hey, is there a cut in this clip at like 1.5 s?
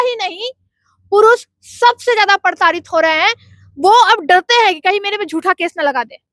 no; 0 cuts

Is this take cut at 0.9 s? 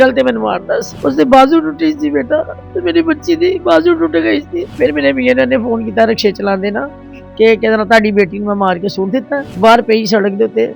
yes; 2 cuts; at 0.9 s, 4.6 s

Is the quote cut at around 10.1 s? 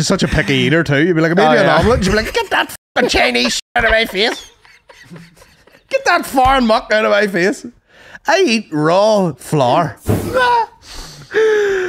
yes; 1 cut; at 10.1 s

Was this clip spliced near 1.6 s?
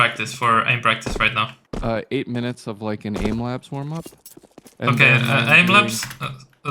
yes; 1 cut; at 1.6 s

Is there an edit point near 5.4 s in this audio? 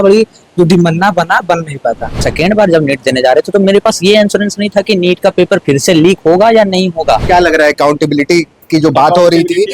no; 2 cuts; at 2.1 s, 7.2 s

